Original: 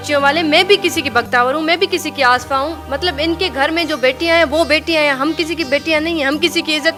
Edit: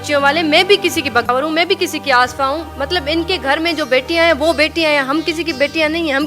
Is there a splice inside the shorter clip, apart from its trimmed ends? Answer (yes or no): yes